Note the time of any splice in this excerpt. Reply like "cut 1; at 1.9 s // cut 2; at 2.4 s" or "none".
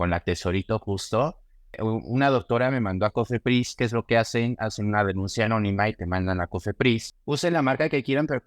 cut 1; at 1.8 s // cut 2; at 7.1 s